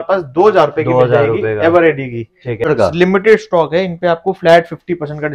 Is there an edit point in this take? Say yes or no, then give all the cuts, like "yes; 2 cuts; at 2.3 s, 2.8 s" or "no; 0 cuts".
yes; 1 cut; at 2.7 s